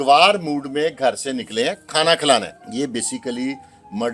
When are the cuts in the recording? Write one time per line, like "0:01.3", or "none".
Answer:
0:02.6